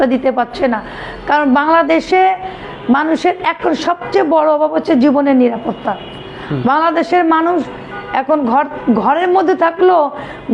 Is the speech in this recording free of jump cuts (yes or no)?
yes